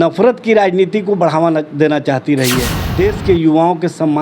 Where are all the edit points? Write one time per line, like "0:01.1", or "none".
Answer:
0:02.8